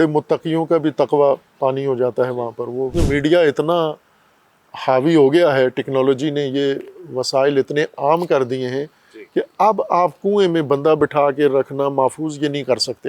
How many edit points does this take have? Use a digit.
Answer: 1